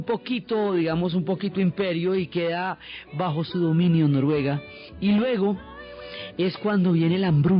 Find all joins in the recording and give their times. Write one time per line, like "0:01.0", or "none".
none